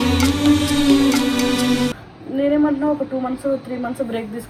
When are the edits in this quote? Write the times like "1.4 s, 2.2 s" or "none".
none